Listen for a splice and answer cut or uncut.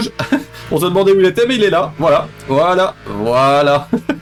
uncut